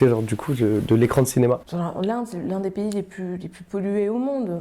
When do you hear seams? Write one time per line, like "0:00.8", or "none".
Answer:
0:01.7